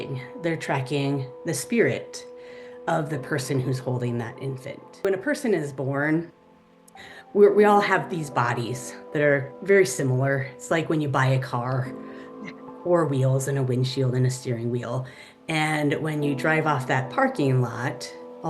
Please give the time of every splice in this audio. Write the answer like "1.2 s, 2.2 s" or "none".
5.3 s